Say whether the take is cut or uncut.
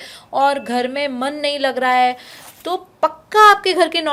uncut